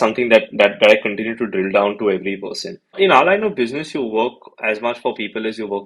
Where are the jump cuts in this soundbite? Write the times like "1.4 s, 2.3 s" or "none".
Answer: 3.0 s